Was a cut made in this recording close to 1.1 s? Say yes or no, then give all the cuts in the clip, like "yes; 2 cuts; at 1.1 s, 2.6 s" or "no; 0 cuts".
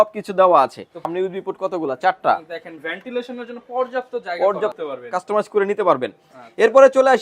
yes; 2 cuts; at 1.1 s, 4.8 s